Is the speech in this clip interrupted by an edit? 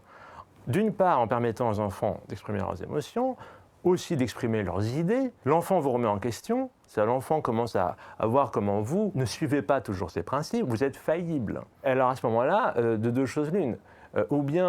yes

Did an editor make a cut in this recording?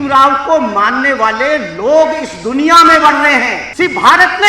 yes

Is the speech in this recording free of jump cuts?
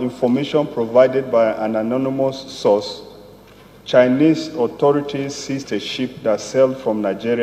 yes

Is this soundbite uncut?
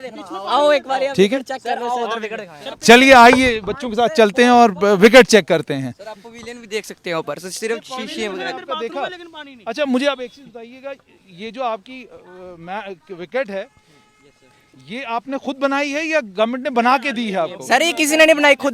yes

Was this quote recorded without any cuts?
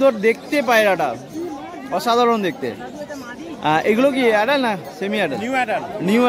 yes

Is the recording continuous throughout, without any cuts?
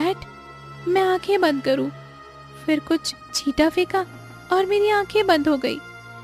yes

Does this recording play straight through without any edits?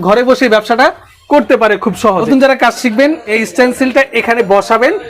no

